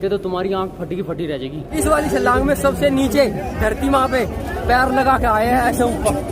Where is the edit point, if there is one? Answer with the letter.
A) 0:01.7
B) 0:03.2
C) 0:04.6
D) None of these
A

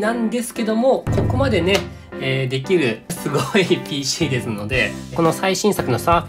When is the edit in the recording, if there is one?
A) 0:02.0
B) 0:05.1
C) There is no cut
B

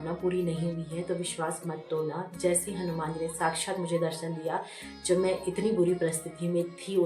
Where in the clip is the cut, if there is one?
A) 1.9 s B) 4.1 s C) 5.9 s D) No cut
D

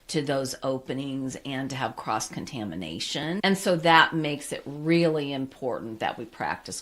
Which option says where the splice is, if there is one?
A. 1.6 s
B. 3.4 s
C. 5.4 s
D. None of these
B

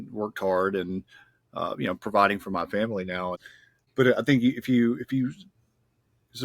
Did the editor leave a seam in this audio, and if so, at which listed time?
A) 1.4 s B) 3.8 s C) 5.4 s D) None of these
B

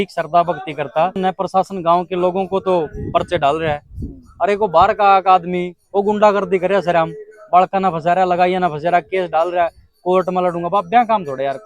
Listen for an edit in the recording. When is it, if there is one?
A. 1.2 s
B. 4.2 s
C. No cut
A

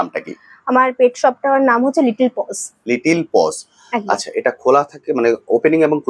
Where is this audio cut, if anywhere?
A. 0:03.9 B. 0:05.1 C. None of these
C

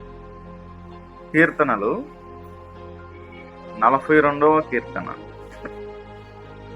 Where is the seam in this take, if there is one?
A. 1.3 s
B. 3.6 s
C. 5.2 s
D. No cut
A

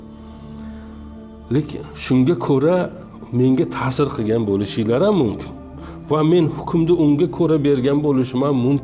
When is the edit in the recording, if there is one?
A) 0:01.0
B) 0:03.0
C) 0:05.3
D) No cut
A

